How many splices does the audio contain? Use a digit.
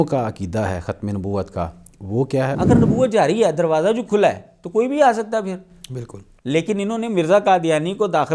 1